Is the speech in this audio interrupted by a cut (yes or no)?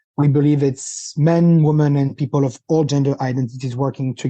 yes